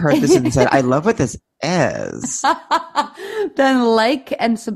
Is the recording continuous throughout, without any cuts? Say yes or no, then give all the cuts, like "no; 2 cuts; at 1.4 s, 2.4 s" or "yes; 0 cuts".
yes; 0 cuts